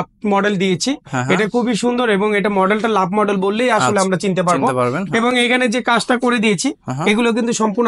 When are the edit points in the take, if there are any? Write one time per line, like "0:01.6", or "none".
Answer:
none